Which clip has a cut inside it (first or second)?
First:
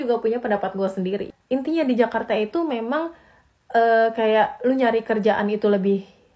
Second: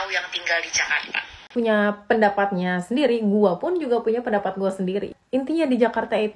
second